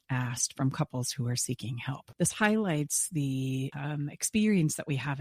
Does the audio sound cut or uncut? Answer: cut